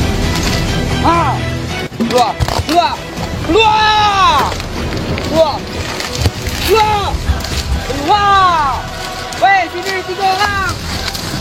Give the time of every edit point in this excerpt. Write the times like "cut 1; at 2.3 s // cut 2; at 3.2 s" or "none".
none